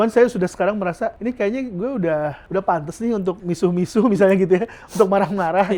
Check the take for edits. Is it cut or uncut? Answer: cut